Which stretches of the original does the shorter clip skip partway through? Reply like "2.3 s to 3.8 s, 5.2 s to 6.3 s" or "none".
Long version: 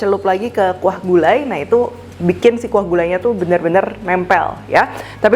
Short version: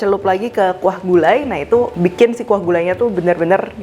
1.9 s to 2.2 s